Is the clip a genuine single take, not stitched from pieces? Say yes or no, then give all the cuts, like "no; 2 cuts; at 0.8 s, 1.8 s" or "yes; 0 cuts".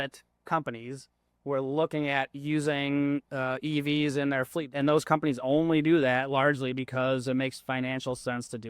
no; 1 cut; at 4.7 s